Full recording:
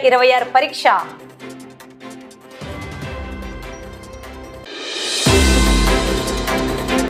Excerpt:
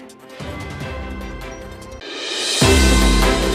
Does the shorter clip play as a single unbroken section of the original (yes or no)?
no